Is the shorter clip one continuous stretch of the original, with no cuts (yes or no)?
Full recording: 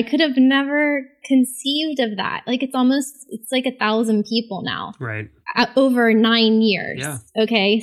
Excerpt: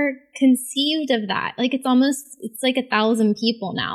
yes